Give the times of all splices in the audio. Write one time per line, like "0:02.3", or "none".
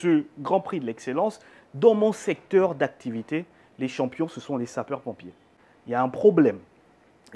none